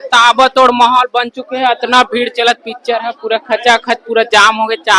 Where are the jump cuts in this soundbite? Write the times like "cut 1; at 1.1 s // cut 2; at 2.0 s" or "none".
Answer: none